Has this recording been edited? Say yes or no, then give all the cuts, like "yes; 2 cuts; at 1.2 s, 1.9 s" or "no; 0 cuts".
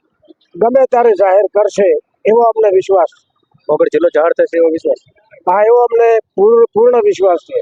no; 0 cuts